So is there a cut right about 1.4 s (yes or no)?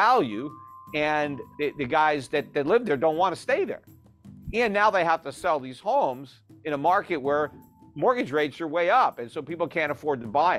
yes